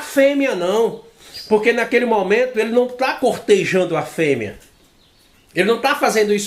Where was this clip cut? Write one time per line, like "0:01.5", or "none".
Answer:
none

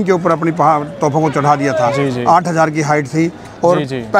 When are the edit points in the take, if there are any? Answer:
none

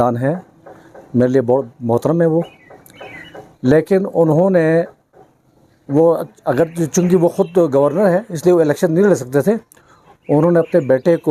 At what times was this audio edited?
none

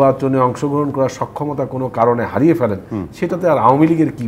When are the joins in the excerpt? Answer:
none

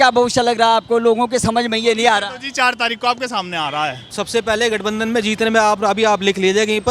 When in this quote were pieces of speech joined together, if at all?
0:04.1

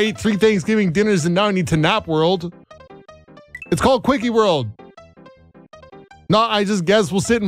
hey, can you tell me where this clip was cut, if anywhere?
none

